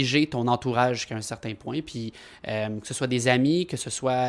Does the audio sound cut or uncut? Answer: uncut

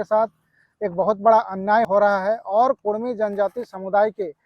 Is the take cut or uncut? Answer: cut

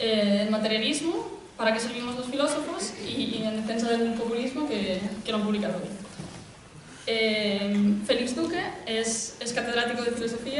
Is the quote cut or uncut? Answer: uncut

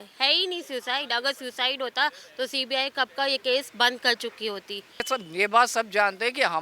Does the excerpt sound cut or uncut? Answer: cut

